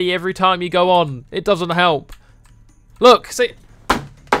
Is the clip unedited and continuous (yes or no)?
yes